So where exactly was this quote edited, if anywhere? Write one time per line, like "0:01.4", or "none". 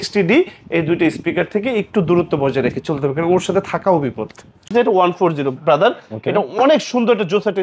0:04.7